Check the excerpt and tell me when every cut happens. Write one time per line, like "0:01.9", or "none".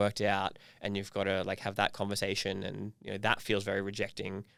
none